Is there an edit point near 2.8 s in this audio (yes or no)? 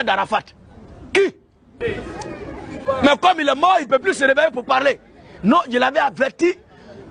yes